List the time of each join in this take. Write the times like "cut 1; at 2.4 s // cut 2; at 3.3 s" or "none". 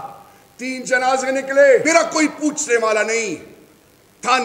cut 1; at 1.8 s

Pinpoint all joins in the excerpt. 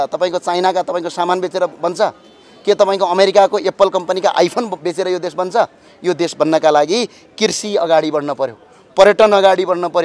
none

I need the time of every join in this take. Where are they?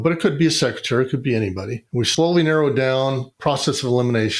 cut 1; at 2.1 s // cut 2; at 3.3 s

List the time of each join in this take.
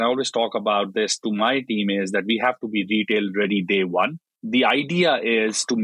cut 1; at 4.4 s

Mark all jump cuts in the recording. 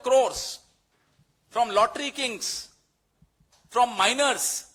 none

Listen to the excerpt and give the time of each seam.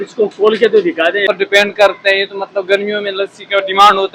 cut 1; at 1.3 s

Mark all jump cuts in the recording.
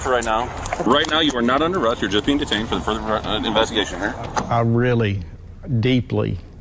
cut 1; at 4.5 s

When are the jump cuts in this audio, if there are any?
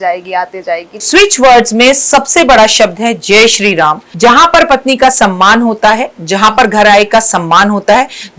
cut 1; at 0.9 s // cut 2; at 4.1 s

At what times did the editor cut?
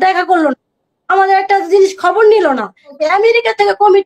cut 1; at 2.9 s

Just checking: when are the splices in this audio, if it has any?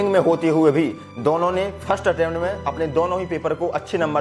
none

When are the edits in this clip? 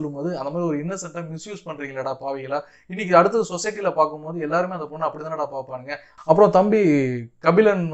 cut 1; at 6.1 s

